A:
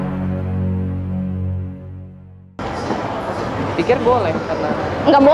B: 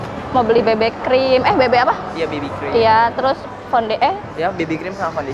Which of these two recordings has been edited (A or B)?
A